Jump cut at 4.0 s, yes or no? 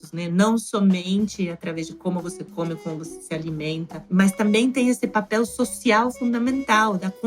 yes